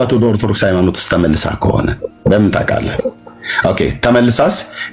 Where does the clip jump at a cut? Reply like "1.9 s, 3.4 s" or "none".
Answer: none